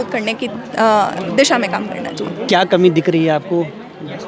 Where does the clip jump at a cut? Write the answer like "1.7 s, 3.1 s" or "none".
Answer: none